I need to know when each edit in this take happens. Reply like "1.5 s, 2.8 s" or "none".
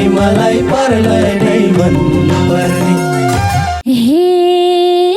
3.8 s